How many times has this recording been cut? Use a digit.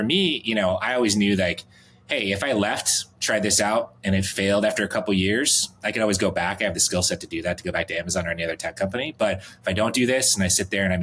0